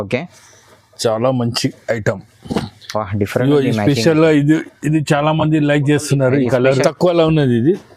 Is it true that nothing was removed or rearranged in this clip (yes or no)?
no